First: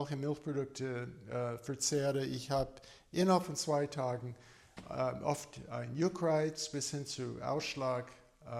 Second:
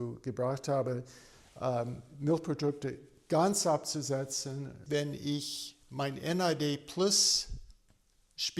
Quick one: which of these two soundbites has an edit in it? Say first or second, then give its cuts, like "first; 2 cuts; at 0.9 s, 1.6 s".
second; 1 cut; at 4.7 s